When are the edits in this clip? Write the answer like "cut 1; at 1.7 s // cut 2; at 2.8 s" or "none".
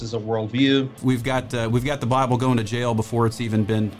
cut 1; at 1.5 s